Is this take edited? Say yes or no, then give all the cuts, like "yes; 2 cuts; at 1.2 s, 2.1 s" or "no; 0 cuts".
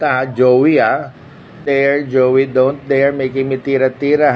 yes; 1 cut; at 1.6 s